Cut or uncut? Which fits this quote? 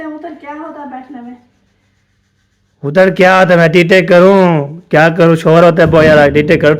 uncut